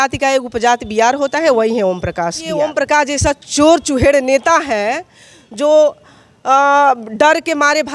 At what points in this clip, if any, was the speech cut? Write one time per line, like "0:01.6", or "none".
0:02.6